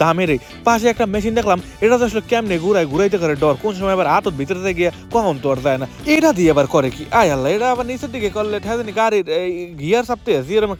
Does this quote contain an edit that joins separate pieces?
no; 0 cuts

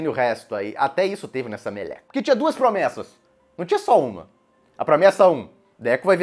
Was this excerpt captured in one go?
yes; 0 cuts

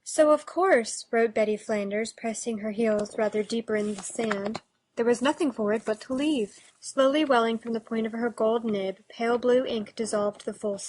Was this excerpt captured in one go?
no; 1 cut; at 7.6 s

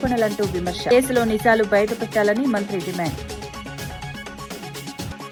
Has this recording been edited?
no; 0 cuts

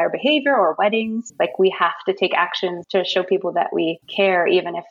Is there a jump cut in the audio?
yes; 3 cuts; at 1.2 s, 2.8 s, 4.0 s

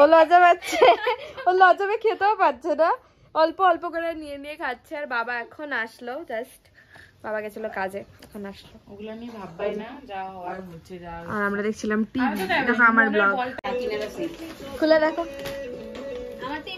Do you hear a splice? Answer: no; 0 cuts

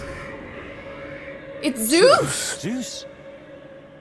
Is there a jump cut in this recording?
no; 0 cuts

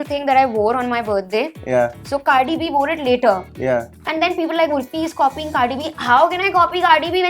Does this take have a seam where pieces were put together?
no; 0 cuts

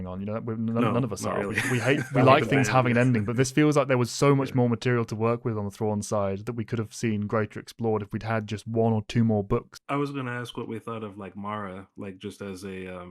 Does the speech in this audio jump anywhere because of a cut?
yes; 1 cut; at 9.7 s

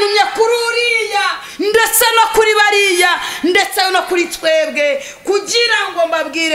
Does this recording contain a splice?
no; 0 cuts

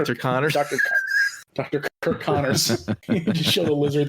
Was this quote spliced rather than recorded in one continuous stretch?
yes; 2 cuts; at 2.0 s, 2.9 s

